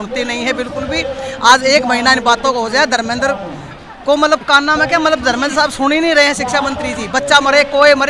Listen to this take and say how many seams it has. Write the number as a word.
zero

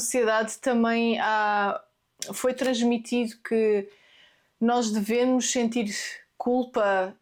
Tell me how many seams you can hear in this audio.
zero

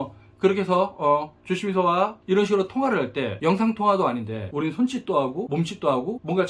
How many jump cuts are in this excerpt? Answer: three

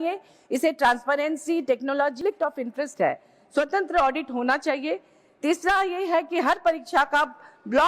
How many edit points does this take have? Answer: one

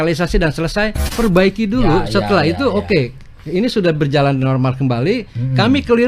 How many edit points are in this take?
one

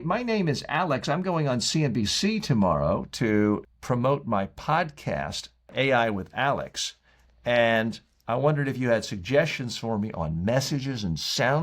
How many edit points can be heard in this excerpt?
two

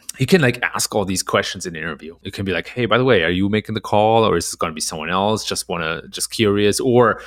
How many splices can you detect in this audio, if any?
one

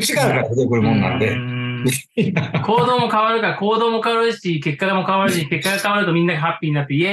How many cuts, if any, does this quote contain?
zero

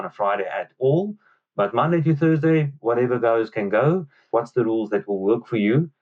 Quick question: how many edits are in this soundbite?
one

